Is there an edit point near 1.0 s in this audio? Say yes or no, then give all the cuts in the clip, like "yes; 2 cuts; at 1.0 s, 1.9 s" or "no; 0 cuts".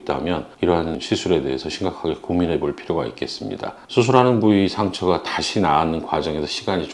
yes; 1 cut; at 1.0 s